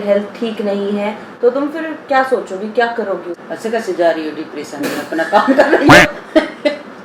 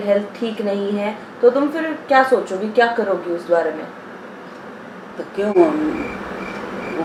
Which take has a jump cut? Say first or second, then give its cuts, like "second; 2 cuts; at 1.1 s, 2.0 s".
first; 2 cuts; at 3.3 s, 5.1 s